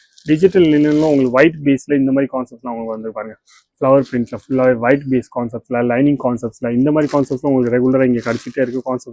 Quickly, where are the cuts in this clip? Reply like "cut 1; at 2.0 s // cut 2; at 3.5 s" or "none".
none